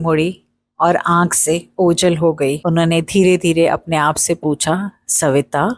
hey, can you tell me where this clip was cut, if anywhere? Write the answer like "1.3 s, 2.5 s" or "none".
2.6 s